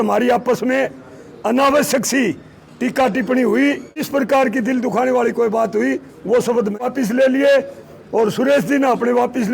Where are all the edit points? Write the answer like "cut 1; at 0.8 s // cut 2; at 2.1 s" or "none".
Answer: cut 1; at 4.1 s // cut 2; at 6.8 s